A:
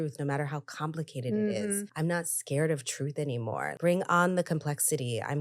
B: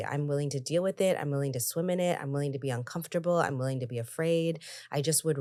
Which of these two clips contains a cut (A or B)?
A